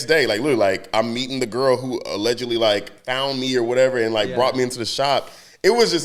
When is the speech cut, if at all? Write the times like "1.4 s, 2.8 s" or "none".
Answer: none